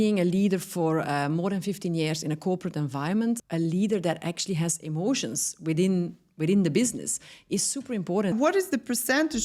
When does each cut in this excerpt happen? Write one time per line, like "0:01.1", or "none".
0:03.4
0:08.3